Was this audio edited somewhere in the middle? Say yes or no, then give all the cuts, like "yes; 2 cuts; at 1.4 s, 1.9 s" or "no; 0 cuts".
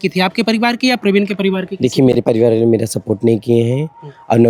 no; 0 cuts